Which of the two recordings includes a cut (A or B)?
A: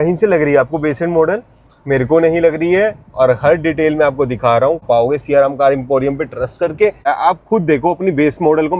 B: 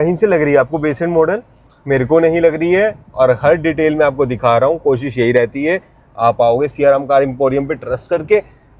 A